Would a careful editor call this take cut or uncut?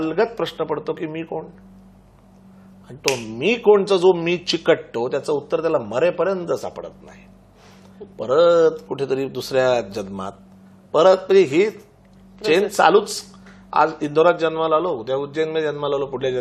uncut